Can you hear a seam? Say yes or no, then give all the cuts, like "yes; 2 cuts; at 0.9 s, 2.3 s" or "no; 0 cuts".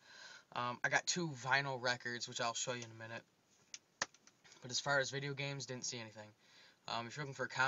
yes; 1 cut; at 1.4 s